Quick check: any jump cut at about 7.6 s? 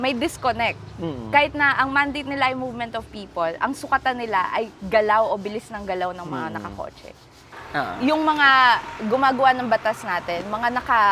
yes; 1 cut; at 7.6 s

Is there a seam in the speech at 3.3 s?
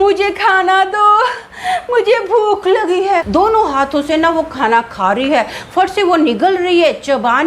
yes; 1 cut; at 3.3 s

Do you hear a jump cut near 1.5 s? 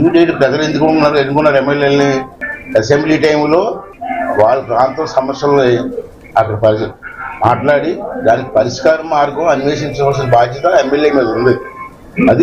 yes; 1 cut; at 1.5 s

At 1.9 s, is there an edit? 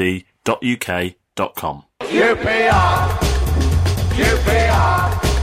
yes; 1 cut; at 1.9 s

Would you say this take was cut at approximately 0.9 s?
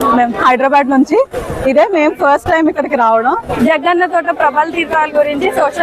no; 1 cut; at 3.6 s

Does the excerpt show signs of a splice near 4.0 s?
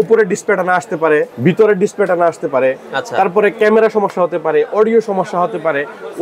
no; 1 cut; at 1.3 s

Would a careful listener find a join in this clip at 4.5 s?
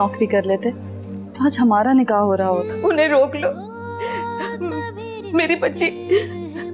no; 1 cut; at 2.7 s

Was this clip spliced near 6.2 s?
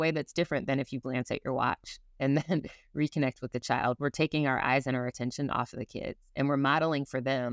no; 0 cuts

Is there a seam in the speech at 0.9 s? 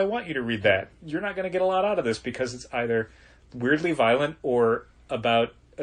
yes; 1 cut; at 0.9 s

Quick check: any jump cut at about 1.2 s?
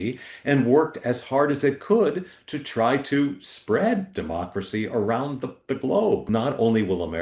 no; 1 cut; at 6.2 s

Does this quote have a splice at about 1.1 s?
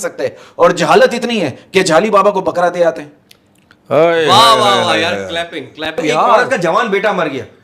no; 1 cut; at 6.0 s

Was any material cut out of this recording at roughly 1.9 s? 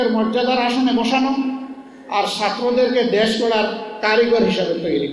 no; 0 cuts

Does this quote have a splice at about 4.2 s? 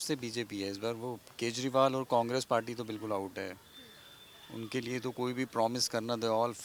no; 0 cuts

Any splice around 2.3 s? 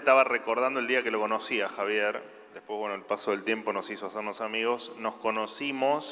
no; 0 cuts

